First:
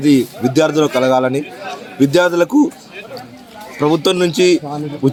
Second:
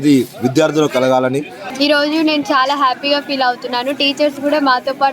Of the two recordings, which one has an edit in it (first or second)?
second